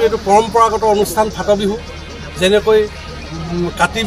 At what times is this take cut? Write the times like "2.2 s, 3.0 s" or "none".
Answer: none